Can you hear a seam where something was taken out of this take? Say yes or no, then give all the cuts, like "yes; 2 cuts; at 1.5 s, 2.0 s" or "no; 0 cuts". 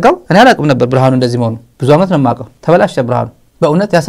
no; 0 cuts